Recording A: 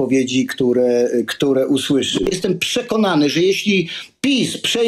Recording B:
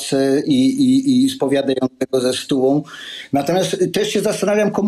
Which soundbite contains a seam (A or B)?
A